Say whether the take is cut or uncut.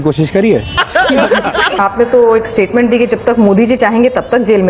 cut